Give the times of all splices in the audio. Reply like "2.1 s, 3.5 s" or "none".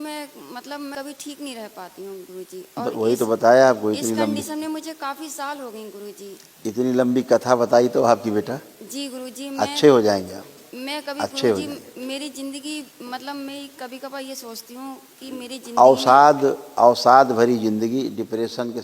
0.9 s